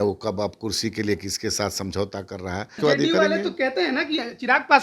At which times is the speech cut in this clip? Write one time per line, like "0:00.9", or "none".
0:02.8